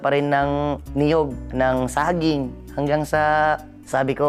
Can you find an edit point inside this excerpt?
yes; 2 cuts; at 1.4 s, 2.6 s

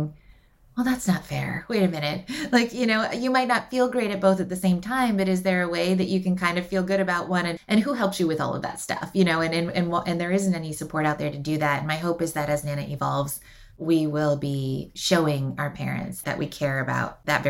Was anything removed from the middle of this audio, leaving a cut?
yes; 2 cuts; at 7.5 s, 16.2 s

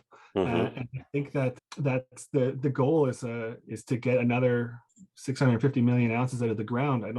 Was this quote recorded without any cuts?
no; 1 cut; at 1.5 s

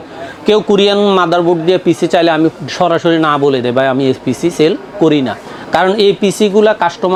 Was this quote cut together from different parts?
no; 0 cuts

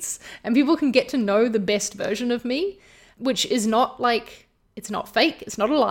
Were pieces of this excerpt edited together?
yes; 1 cut; at 3.0 s

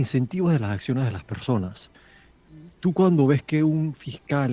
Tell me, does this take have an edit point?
no; 0 cuts

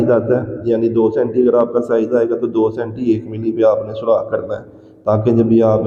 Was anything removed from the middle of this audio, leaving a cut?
no; 0 cuts

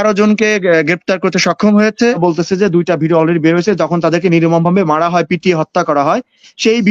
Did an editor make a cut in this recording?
yes; 1 cut; at 2.2 s

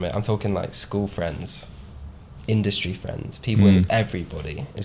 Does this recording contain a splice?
no; 0 cuts

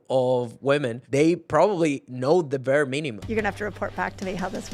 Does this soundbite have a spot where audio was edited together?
yes; 2 cuts; at 1.0 s, 3.2 s

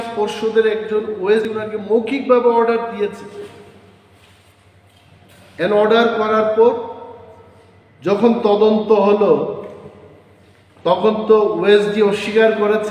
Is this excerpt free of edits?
no; 1 cut; at 1.4 s

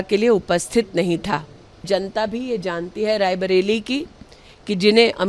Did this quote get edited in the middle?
yes; 1 cut; at 1.8 s

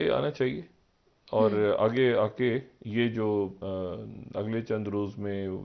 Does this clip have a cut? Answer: no; 0 cuts

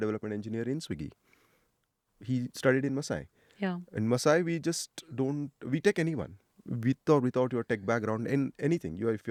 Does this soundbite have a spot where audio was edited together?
no; 0 cuts

